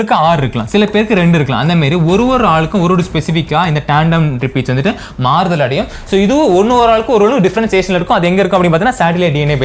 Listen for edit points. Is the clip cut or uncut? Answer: uncut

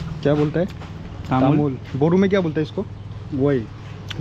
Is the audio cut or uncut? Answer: uncut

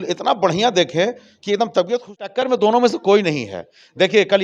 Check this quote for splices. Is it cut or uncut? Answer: cut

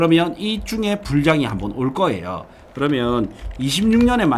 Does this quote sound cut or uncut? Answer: uncut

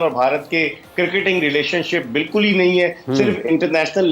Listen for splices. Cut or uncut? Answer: uncut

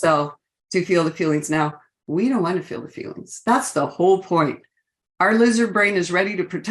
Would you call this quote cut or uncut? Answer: uncut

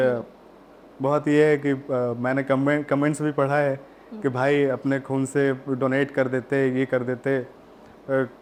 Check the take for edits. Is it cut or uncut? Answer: uncut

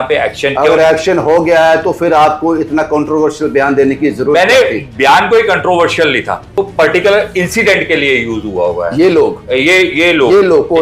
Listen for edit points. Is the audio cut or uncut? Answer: cut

